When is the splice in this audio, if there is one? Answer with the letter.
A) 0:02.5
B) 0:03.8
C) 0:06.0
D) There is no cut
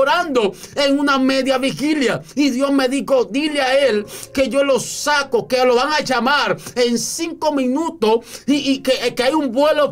D